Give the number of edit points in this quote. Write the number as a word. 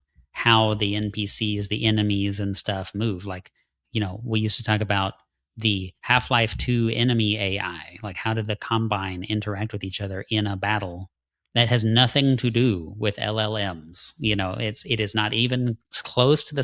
zero